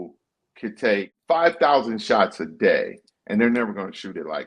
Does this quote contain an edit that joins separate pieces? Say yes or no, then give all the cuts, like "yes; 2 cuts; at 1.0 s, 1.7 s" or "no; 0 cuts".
yes; 1 cut; at 1.1 s